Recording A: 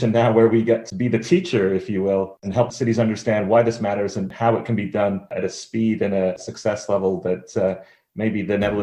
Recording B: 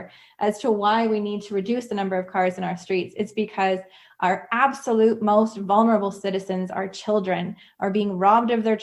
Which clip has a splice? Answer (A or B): A